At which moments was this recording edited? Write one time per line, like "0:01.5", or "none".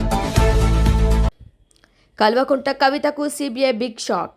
0:01.4